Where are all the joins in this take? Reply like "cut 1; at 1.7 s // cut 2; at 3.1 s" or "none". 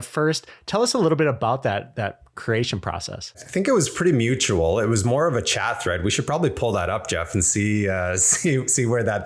cut 1; at 3.4 s